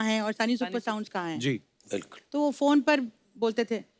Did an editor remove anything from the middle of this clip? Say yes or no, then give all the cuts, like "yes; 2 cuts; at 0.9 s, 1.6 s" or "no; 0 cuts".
no; 0 cuts